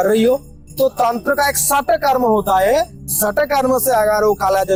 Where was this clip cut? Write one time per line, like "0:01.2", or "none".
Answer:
none